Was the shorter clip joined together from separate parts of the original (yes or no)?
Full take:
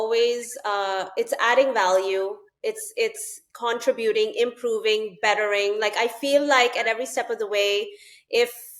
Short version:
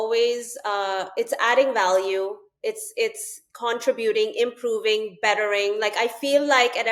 no